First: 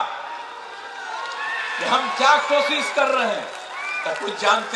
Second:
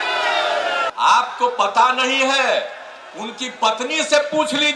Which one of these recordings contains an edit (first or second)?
second